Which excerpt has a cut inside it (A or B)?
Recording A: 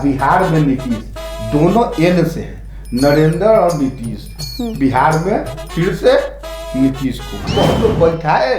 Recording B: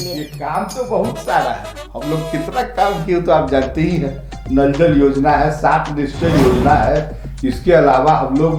A